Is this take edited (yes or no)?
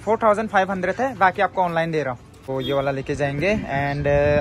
yes